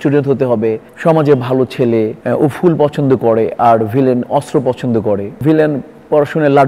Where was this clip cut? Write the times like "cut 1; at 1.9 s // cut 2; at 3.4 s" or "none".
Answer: cut 1; at 0.9 s // cut 2; at 2.2 s // cut 3; at 5.3 s